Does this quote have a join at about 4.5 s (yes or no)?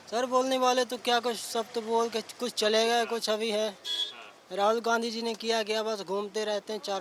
no